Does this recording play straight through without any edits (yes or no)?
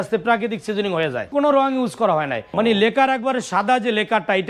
no